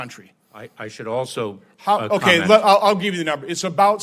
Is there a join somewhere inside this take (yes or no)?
no